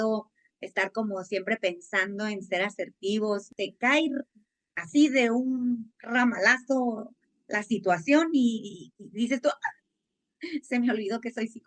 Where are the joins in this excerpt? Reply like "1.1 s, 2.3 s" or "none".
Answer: 3.5 s